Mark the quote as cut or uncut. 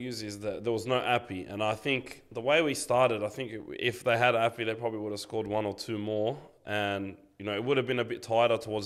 uncut